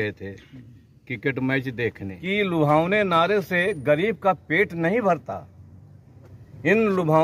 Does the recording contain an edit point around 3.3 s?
no; 1 cut; at 2.1 s

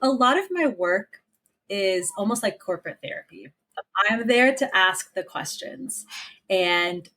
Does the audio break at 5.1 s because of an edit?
no; 1 cut; at 3.9 s

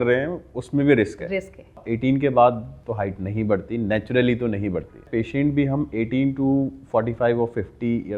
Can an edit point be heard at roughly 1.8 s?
yes; 3 cuts; at 1.8 s, 2.7 s, 5.0 s

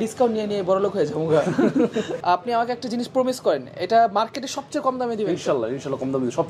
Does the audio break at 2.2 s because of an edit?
yes; 1 cut; at 2.2 s

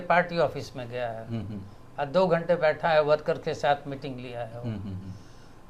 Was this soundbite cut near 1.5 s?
no; 0 cuts

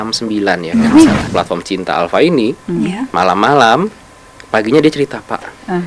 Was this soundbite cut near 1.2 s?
yes; 1 cut; at 1.2 s

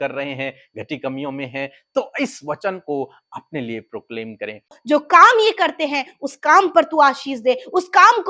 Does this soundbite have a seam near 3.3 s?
no; 1 cut; at 4.8 s

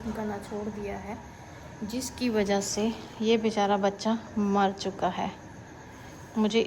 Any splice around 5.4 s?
no; 0 cuts

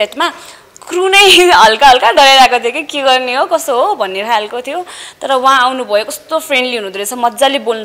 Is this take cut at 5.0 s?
no; 0 cuts

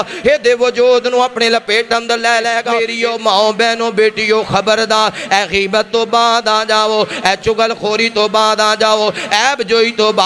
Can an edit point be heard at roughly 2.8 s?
yes; 1 cut; at 2.8 s

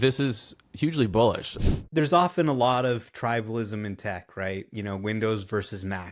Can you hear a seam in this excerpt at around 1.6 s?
yes; 1 cut; at 1.6 s

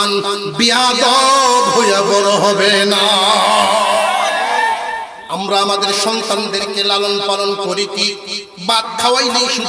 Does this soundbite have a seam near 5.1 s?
yes; 1 cut; at 5.1 s

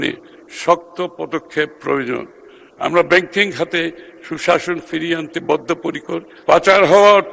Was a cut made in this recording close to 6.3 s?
yes; 1 cut; at 6.3 s

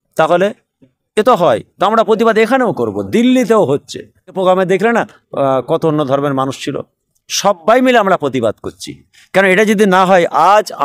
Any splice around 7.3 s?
no; 1 cut; at 4.3 s

